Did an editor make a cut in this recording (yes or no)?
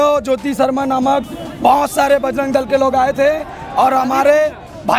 no